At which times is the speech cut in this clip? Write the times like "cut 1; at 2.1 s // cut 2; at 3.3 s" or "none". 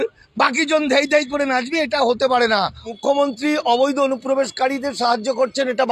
cut 1; at 2.9 s